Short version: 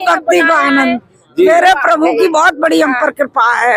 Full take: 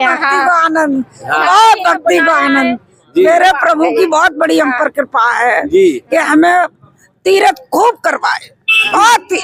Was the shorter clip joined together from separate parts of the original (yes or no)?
no